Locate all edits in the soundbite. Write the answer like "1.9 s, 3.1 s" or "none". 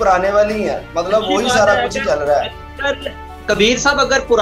none